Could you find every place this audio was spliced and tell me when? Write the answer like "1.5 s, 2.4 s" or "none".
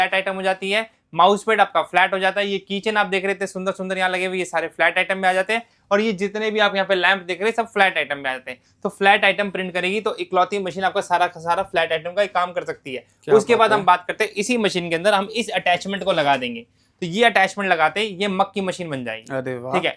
none